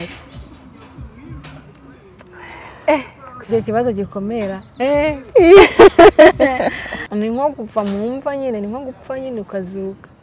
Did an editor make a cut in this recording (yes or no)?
yes